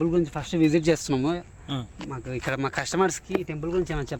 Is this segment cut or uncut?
uncut